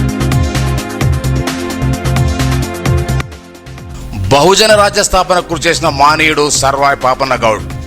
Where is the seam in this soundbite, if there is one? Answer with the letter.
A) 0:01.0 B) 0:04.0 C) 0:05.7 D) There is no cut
A